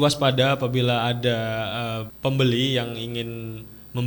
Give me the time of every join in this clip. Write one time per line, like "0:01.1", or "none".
0:02.1

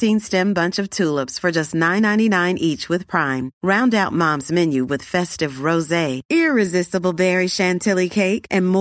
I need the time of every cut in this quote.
none

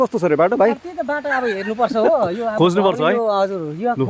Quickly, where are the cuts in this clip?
none

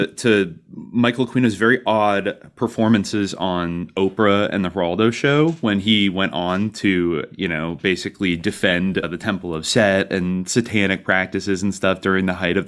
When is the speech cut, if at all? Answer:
none

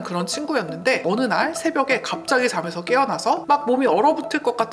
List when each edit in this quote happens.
0:01.0
0:03.4

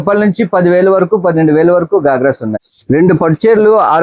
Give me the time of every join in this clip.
0:02.5

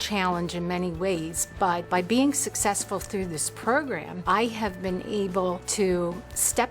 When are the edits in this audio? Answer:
0:01.8
0:04.1
0:05.6

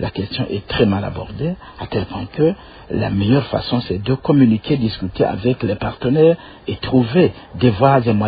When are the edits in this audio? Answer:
none

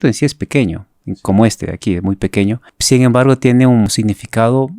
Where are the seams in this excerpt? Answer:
0:02.6
0:03.9

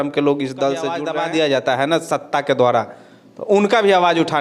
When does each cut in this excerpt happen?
0:01.0

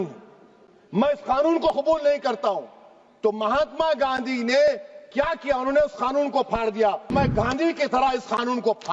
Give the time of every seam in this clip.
0:07.1

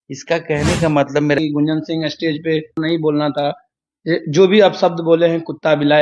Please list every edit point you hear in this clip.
0:01.4
0:02.8

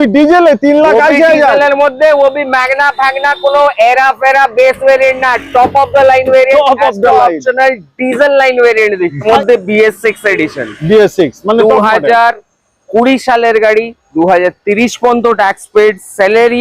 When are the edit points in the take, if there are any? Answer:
0:09.2

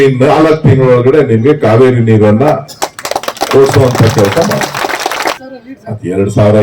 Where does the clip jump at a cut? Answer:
0:05.4

